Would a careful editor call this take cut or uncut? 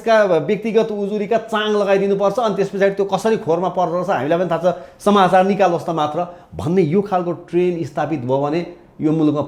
uncut